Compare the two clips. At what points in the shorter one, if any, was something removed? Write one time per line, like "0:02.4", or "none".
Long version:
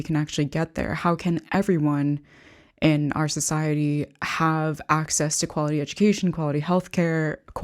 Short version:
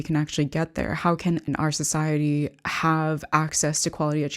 0:01.5